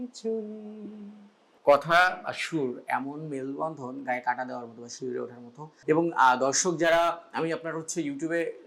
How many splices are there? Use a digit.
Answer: 0